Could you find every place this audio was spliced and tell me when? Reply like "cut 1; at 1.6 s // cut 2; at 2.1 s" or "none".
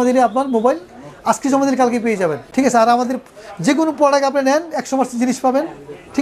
cut 1; at 2.4 s